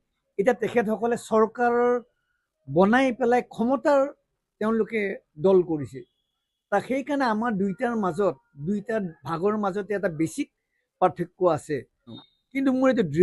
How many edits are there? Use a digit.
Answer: 1